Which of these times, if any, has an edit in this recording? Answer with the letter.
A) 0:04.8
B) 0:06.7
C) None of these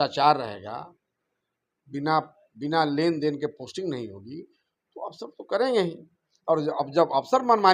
C